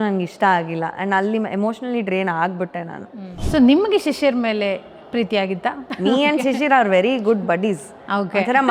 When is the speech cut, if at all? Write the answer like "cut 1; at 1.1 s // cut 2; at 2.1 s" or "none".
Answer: cut 1; at 3.4 s // cut 2; at 5.9 s